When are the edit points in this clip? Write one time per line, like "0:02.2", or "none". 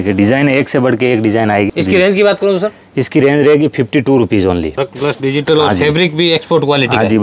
0:01.7
0:04.7